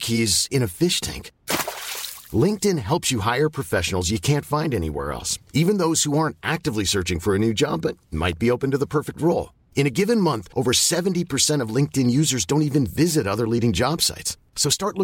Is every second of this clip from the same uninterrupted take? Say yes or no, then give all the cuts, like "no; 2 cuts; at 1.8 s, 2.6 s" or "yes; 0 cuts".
yes; 0 cuts